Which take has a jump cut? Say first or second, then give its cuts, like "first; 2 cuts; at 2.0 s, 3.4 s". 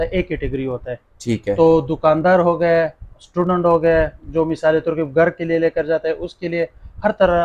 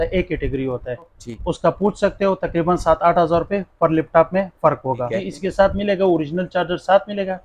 second; 2 cuts; at 1.2 s, 5.2 s